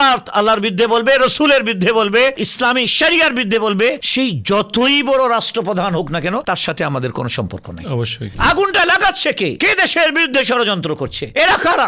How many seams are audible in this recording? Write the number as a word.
one